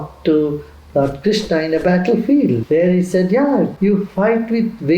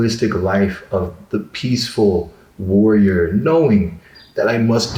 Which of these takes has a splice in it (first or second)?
first